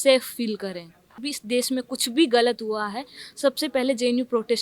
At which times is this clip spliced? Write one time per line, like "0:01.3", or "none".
0:01.3